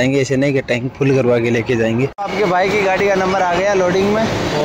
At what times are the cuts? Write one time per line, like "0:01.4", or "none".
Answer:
0:02.2